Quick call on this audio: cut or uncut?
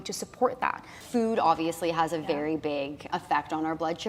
cut